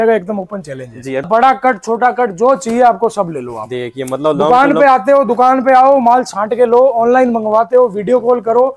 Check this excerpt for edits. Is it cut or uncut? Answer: cut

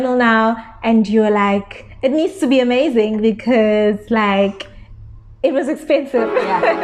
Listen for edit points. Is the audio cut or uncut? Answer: uncut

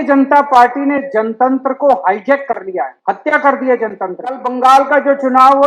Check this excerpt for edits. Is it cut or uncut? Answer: cut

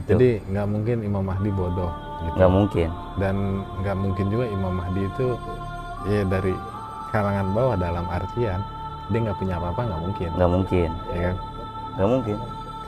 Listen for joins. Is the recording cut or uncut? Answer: uncut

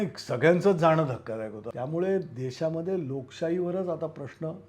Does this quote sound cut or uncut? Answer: cut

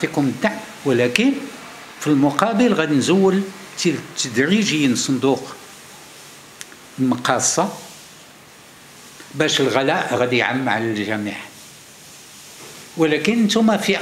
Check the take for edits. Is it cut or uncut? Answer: uncut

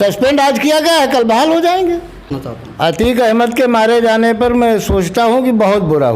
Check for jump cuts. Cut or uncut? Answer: cut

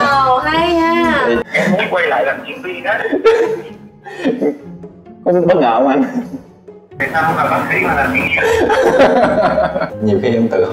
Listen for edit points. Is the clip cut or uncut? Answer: cut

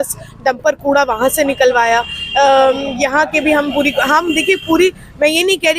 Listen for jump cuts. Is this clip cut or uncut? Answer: uncut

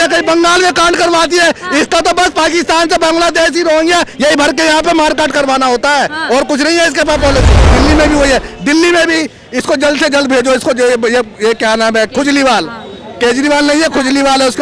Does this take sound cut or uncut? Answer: cut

